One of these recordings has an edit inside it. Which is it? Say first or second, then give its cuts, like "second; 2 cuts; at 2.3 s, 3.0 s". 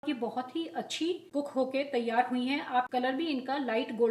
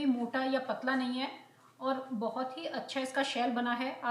first; 2 cuts; at 1.2 s, 2.9 s